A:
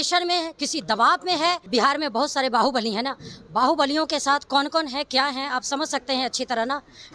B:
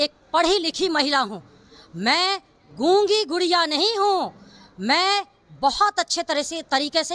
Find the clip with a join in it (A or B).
A